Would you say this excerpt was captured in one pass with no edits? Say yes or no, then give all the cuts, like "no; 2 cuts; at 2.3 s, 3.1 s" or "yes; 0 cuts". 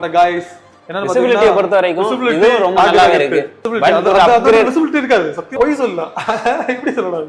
no; 2 cuts; at 3.6 s, 5.6 s